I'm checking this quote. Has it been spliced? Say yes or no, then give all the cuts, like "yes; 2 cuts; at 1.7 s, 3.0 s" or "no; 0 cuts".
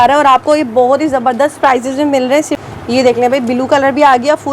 yes; 1 cut; at 2.5 s